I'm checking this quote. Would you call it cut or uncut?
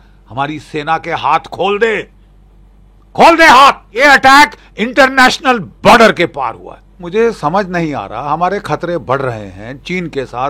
cut